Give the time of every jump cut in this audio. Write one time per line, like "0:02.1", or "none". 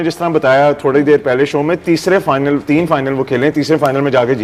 none